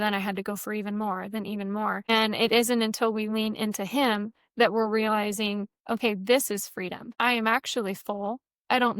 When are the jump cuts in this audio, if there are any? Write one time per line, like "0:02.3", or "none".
0:02.1
0:07.0